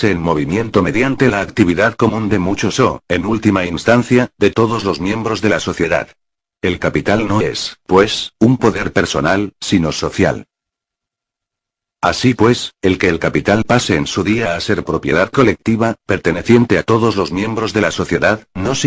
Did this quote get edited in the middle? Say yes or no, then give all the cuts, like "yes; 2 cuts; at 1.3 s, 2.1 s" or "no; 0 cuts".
yes; 1 cut; at 3.4 s